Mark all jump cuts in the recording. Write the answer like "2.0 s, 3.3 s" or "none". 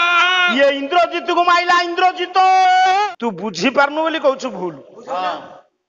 3.1 s